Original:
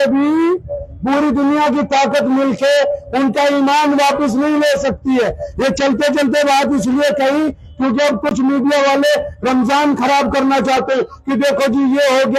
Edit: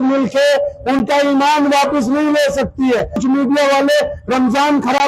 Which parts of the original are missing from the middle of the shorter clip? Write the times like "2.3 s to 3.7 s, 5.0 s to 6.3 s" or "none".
5.4 s to 8.3 s

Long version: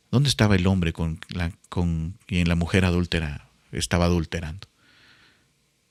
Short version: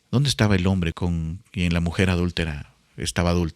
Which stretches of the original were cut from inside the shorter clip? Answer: 0.9 s to 1.7 s

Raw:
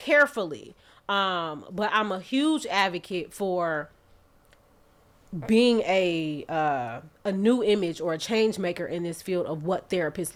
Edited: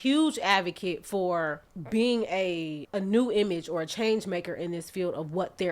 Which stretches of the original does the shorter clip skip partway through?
4.0 s to 5.3 s, 6.4 s to 7.1 s

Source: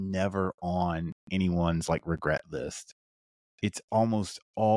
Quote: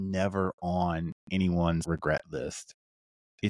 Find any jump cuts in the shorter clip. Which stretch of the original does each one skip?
1.8 s to 2.0 s

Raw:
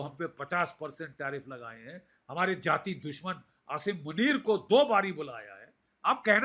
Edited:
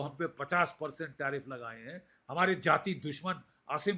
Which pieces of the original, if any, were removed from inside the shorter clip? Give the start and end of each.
none

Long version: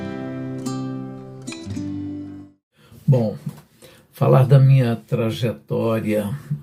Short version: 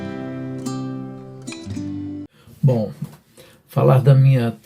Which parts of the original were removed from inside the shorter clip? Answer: 2.4 s to 2.9 s

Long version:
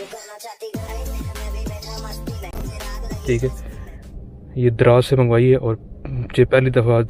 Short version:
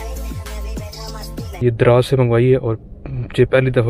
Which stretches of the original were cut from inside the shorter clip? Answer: 2.5 s to 4.6 s

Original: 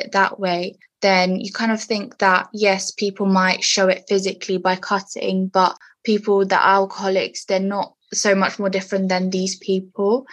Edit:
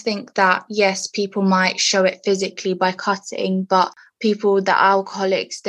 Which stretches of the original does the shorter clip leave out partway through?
none

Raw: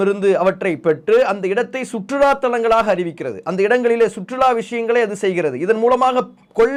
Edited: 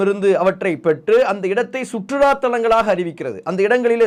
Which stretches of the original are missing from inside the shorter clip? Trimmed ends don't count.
none

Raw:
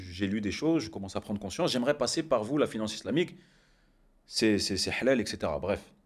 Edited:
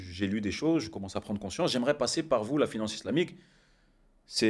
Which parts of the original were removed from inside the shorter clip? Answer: none

